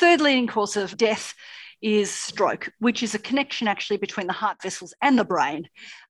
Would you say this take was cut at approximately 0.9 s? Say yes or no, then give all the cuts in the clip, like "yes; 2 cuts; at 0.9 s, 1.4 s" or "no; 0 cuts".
yes; 1 cut; at 0.9 s